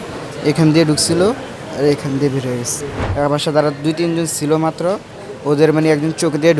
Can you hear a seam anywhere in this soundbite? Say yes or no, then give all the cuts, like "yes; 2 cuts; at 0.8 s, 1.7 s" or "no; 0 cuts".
yes; 1 cut; at 3.3 s